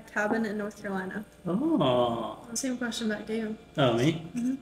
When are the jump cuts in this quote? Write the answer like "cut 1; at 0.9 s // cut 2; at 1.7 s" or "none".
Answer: cut 1; at 2.5 s